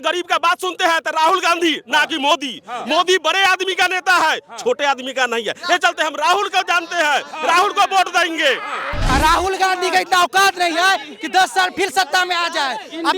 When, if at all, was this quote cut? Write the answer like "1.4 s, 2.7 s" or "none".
9.1 s